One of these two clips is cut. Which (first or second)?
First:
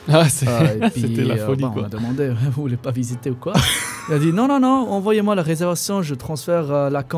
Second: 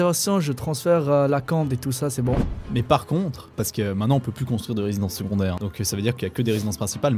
second